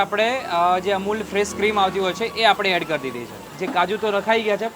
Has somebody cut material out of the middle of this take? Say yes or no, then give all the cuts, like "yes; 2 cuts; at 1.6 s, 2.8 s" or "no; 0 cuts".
yes; 1 cut; at 3.5 s